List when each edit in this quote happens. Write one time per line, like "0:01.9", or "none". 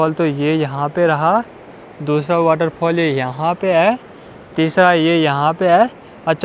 none